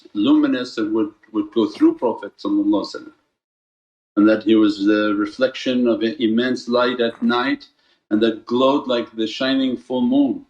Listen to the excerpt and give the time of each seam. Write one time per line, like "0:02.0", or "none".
0:09.5